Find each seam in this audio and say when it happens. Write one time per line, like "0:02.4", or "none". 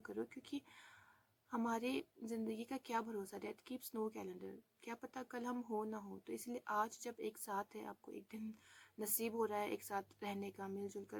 none